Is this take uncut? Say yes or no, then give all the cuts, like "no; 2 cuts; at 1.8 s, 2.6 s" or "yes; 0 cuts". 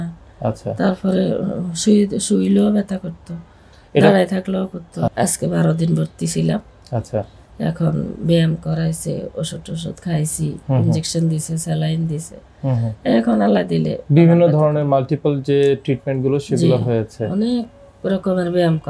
no; 1 cut; at 5.1 s